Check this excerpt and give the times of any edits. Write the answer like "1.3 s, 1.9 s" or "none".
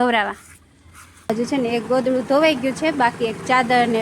1.3 s